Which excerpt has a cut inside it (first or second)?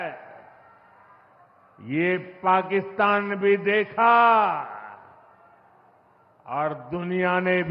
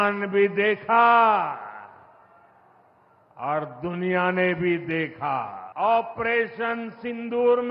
second